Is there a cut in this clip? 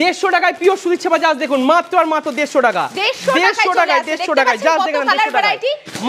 no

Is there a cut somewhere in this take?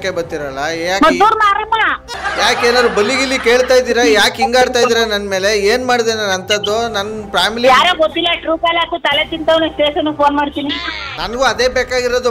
yes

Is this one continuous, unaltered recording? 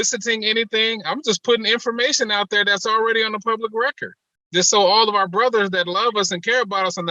yes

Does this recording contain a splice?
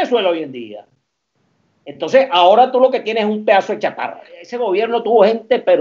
yes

